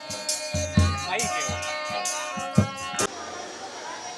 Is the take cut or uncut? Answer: cut